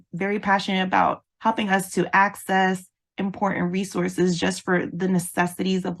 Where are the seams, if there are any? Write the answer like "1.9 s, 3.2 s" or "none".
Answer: 1.2 s